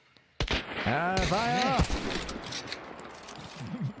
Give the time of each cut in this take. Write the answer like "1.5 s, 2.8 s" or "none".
none